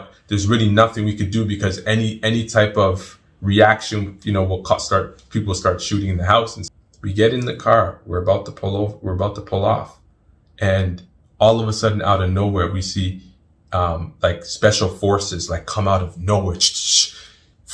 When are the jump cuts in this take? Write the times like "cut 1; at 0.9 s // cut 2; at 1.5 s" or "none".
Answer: cut 1; at 6.6 s